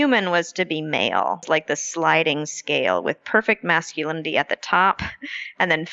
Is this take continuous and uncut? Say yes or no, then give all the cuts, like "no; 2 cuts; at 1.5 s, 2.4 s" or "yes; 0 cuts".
no; 1 cut; at 1.4 s